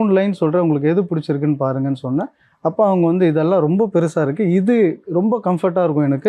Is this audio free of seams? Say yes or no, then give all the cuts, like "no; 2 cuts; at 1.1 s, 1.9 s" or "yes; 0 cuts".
yes; 0 cuts